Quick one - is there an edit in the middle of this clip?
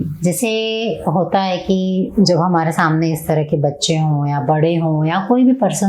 no; 0 cuts

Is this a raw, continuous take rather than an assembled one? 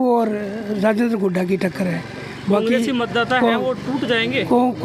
yes; 0 cuts

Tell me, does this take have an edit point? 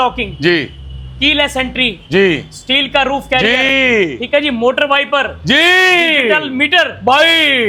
no; 0 cuts

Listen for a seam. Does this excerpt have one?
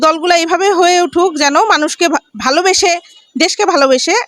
no; 0 cuts

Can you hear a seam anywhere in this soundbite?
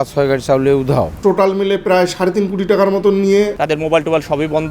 yes; 2 cuts; at 1.1 s, 3.6 s

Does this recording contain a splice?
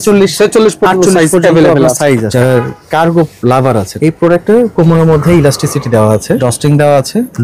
yes; 3 cuts; at 2.3 s, 3.9 s, 6.4 s

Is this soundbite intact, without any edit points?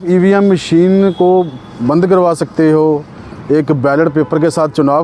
yes; 0 cuts

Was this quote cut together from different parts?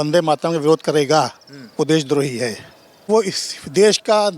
yes; 1 cut; at 3.1 s

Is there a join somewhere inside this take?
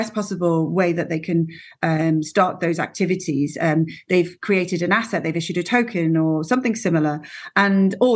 no; 0 cuts

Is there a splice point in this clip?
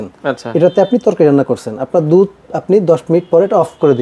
no; 0 cuts

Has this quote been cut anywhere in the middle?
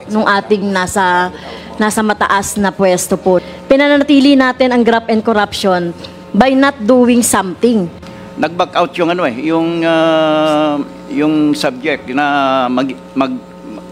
yes; 2 cuts; at 3.4 s, 8.0 s

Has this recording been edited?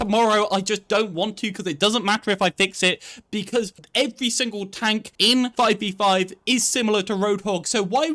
yes; 2 cuts; at 3.8 s, 5.3 s

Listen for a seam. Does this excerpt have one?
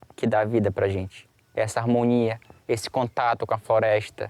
no; 0 cuts

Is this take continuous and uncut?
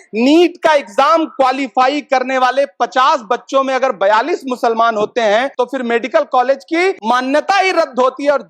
no; 2 cuts; at 5.5 s, 7.0 s

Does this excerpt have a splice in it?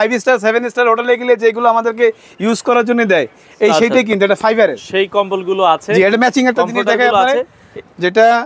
no; 0 cuts

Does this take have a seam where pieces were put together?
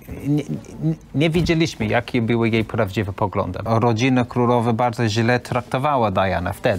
yes; 1 cut; at 3.6 s

